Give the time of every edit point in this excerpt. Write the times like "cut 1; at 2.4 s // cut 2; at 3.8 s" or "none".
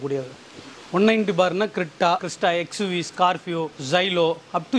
cut 1; at 2.2 s // cut 2; at 3.8 s